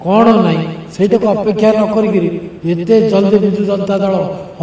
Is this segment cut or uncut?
uncut